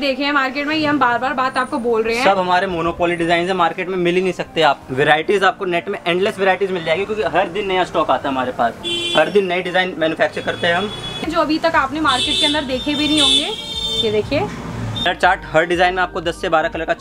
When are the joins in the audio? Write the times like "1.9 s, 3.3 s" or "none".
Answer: 4.8 s, 11.2 s, 15.1 s